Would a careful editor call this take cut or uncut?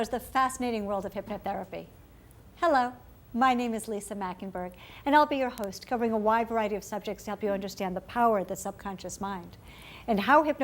cut